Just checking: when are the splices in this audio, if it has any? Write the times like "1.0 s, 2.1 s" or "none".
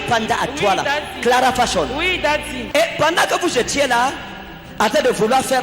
2.6 s